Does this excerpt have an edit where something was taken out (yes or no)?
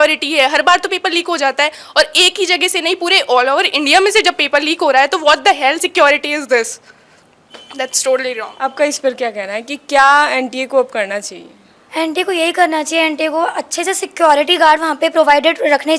no